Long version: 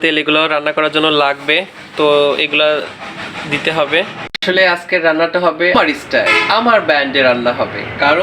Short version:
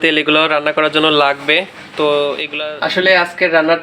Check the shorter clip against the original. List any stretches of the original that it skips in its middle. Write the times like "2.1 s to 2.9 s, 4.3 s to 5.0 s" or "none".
2.7 s to 4.2 s

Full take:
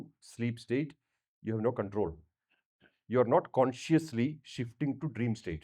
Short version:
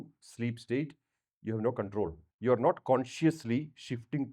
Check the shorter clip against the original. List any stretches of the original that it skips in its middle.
2.2 s to 2.9 s

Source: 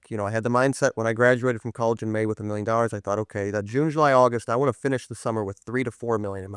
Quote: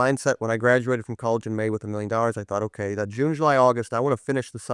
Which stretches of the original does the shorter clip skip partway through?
none

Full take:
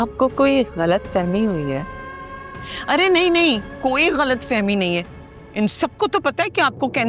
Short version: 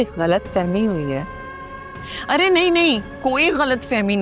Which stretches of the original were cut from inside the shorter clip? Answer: none

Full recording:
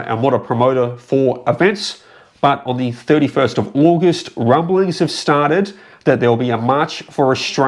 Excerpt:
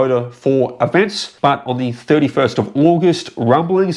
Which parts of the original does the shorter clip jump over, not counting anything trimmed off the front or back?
1.9 s to 2.2 s

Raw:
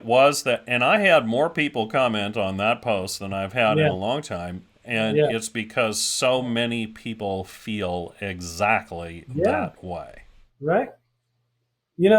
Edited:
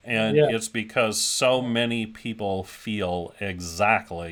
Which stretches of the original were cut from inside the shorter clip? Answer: none

